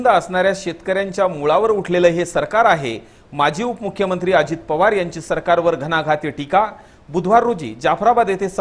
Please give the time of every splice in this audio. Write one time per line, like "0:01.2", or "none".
none